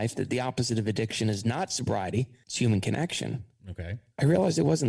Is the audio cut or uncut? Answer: uncut